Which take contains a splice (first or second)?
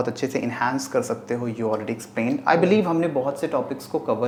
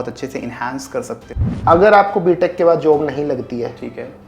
second